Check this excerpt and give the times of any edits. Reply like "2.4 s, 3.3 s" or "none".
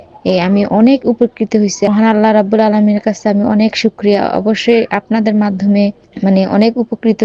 1.9 s, 6.1 s